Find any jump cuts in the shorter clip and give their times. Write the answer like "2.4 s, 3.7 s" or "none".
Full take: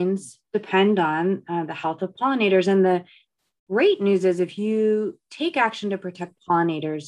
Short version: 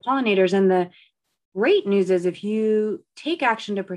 none

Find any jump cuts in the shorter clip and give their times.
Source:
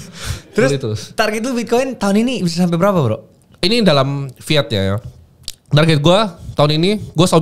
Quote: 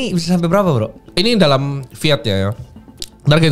1.0 s

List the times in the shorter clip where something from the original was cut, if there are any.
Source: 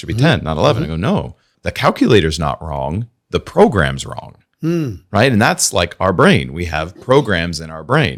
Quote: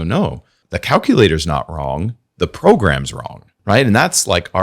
3.5 s

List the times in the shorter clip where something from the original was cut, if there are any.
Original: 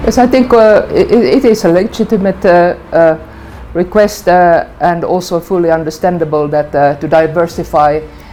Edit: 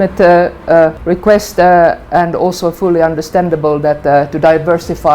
1.0 s

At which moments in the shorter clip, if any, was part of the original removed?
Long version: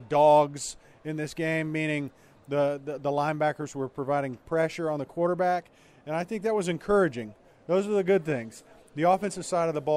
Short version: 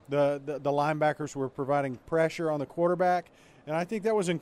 none

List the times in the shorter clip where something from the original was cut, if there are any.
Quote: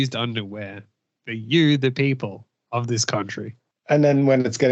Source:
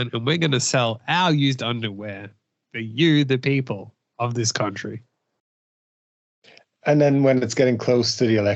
3.7 s

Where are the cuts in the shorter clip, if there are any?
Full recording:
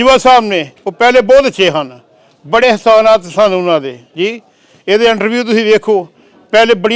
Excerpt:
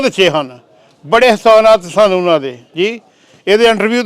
none

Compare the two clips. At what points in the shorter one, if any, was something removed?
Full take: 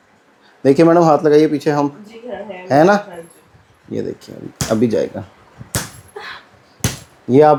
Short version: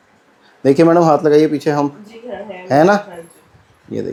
none

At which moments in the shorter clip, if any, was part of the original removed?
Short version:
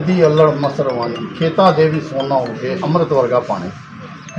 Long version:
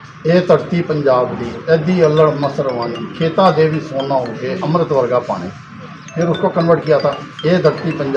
none

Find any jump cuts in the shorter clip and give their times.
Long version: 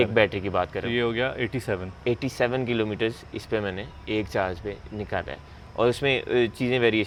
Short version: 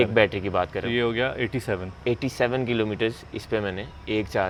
none

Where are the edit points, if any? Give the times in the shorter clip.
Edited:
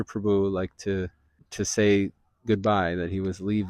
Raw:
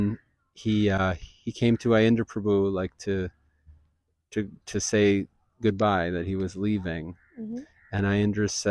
1.4 s

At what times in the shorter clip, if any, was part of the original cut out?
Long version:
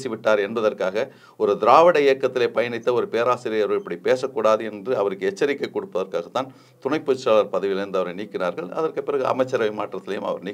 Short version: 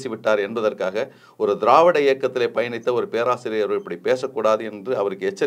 none

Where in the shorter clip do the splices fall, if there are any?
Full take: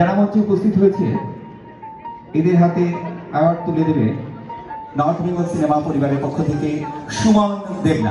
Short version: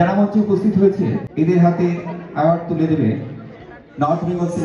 1.3 s

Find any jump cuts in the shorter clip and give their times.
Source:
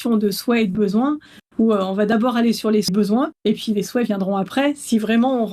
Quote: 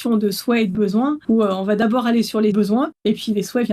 1.2 s, 2.5 s

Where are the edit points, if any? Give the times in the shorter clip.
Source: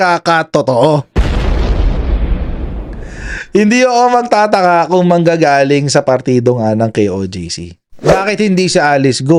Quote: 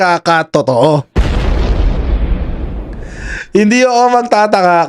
none

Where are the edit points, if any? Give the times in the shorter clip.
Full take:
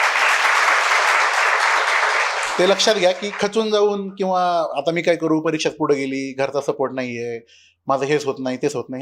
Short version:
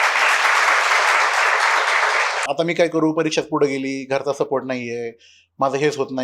2.5 s

